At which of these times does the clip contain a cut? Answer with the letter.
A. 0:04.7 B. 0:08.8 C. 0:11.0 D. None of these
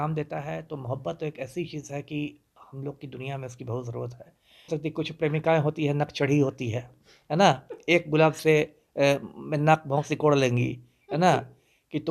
A